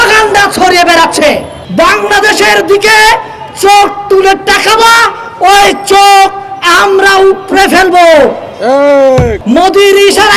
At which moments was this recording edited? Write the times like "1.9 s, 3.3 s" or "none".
1.6 s, 9.4 s